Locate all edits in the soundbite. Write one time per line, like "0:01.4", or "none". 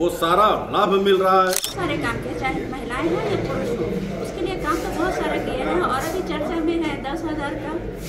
0:01.7